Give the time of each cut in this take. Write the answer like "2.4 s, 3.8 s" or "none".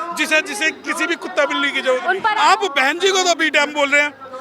2.2 s